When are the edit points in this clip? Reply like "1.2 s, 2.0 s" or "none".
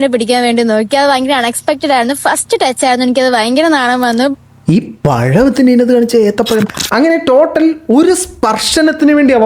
6.8 s